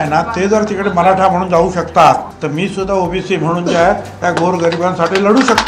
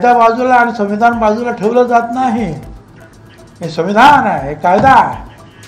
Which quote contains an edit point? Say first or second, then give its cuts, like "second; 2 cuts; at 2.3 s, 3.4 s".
first; 1 cut; at 2.3 s